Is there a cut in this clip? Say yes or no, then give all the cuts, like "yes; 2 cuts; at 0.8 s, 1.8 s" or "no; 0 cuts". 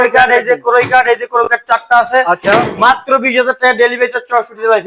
no; 0 cuts